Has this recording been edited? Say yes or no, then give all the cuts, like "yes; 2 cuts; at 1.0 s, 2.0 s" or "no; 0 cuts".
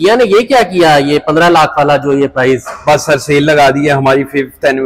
no; 0 cuts